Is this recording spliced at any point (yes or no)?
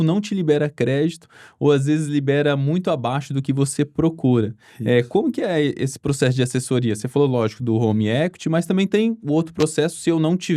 no